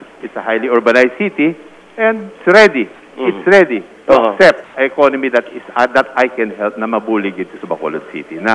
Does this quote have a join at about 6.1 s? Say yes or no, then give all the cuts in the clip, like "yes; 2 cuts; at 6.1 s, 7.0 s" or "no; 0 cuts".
no; 2 cuts; at 2.3 s, 4.7 s